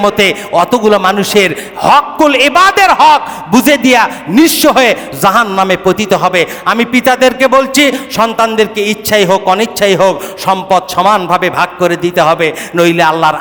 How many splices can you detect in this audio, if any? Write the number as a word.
zero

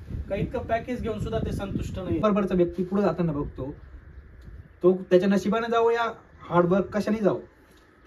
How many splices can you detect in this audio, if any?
one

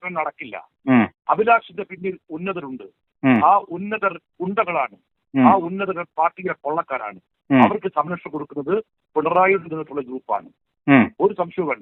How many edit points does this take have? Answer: zero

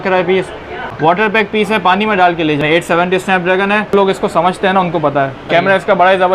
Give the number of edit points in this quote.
four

